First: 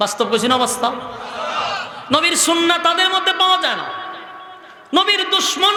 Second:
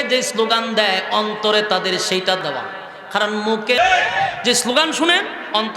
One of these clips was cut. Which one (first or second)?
second